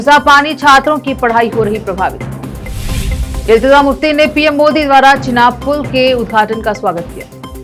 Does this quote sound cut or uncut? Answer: uncut